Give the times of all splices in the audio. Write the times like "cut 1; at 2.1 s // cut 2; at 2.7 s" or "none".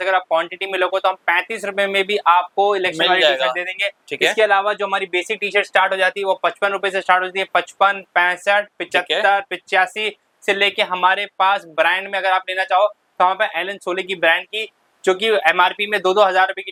none